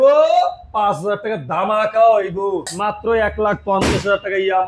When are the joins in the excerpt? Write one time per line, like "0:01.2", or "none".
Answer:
0:02.7

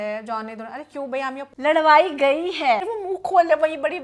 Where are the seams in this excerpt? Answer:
0:01.4
0:02.9

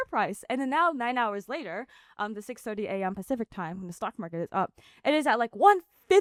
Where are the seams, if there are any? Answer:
none

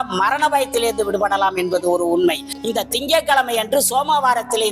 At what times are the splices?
0:02.4

